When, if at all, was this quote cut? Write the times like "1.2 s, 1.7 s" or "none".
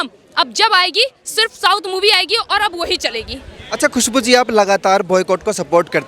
none

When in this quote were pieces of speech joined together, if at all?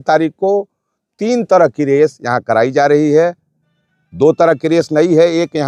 none

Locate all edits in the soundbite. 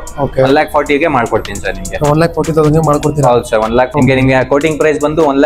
3.9 s

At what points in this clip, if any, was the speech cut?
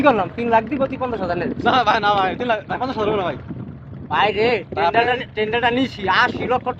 none

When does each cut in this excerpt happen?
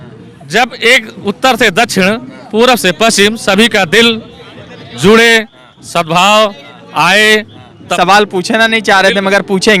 7.9 s

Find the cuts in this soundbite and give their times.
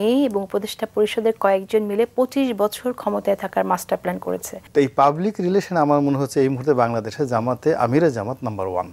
4.5 s

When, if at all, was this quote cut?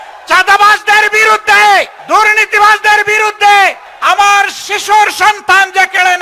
2.0 s, 3.9 s

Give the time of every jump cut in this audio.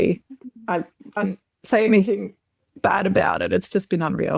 1.2 s

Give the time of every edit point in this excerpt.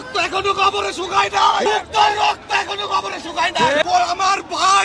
1.6 s, 3.8 s

